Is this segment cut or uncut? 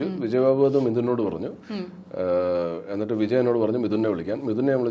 uncut